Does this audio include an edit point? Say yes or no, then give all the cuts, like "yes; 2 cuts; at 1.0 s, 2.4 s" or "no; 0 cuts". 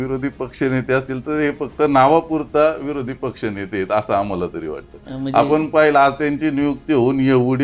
no; 0 cuts